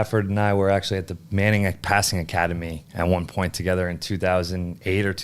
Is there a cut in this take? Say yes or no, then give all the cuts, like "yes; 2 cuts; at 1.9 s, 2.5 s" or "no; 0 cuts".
no; 0 cuts